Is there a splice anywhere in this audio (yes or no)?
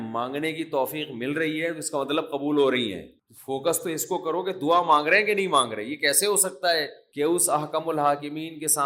no